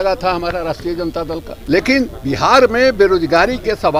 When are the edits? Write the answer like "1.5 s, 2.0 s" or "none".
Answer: 1.5 s